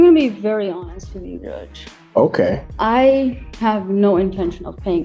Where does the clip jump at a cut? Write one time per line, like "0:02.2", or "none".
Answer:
0:02.7